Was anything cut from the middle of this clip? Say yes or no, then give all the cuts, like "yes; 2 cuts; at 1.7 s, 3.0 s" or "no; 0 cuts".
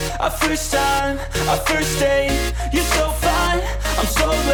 no; 0 cuts